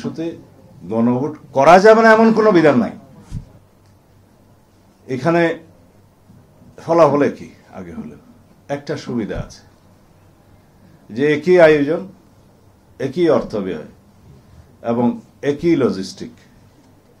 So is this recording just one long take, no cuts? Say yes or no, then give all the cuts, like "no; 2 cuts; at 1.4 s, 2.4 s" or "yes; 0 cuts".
no; 1 cut; at 3.5 s